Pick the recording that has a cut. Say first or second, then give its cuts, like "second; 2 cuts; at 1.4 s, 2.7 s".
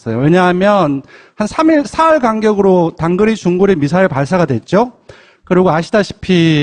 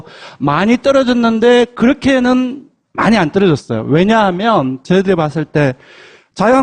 second; 1 cut; at 5.6 s